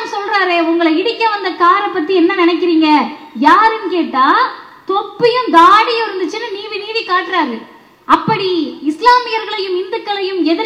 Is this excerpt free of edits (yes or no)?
yes